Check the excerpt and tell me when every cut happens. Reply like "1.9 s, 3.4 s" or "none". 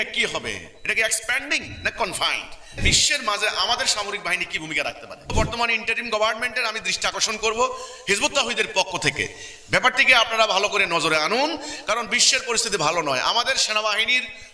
2.8 s, 5.3 s